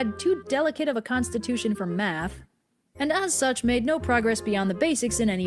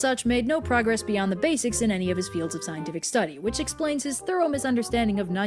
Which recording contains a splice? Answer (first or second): second